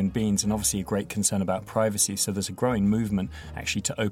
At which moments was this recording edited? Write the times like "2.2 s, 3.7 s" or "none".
none